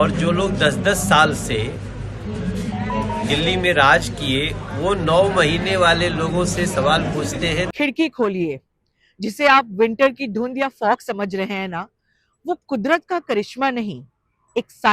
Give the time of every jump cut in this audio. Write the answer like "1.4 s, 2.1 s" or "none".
7.7 s